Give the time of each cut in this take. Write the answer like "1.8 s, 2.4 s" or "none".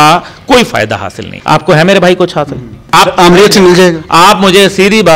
1.3 s, 2.9 s